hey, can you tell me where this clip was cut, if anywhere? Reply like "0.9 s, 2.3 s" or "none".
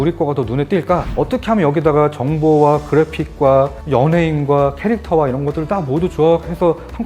1.1 s